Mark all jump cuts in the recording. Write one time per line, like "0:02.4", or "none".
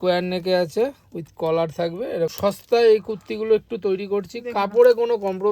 0:02.3